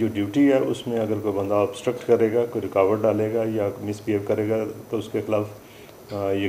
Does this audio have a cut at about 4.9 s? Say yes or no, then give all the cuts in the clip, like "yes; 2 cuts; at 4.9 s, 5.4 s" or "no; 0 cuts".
no; 0 cuts